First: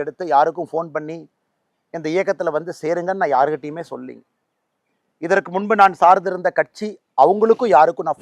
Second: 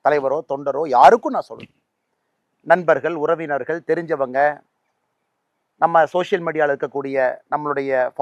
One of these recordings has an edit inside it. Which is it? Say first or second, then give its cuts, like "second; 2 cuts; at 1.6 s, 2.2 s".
first; 1 cut; at 3.0 s